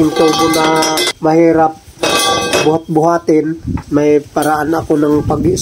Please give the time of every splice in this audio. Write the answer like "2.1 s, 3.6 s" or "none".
1.1 s, 3.7 s